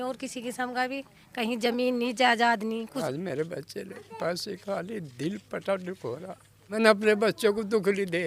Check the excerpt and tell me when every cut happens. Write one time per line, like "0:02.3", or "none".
0:03.0
0:06.7